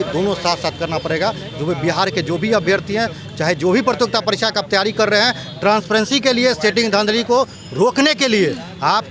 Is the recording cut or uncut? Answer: uncut